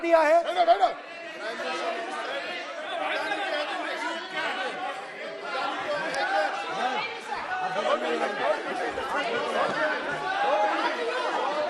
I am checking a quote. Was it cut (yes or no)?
no